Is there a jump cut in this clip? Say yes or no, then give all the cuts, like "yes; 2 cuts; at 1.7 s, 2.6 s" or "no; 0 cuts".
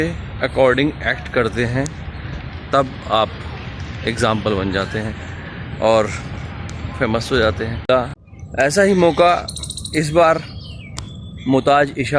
yes; 1 cut; at 7.9 s